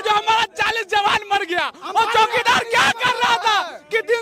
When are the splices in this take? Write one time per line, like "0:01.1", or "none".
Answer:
none